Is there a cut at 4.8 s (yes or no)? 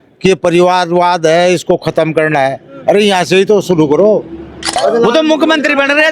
yes